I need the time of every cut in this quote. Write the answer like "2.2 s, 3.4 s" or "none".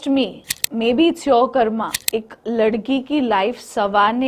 1.9 s